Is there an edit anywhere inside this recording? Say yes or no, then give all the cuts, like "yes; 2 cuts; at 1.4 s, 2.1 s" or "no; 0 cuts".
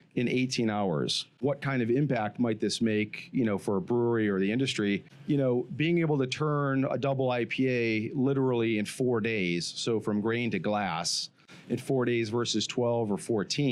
yes; 1 cut; at 1.4 s